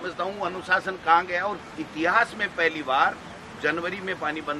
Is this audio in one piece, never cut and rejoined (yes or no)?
no